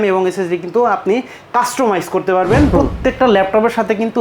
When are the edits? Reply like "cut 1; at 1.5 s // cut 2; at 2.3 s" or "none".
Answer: cut 1; at 2.7 s